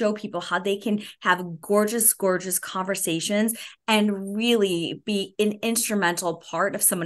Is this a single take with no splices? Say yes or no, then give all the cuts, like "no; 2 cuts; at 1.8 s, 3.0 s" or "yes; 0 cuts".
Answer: yes; 0 cuts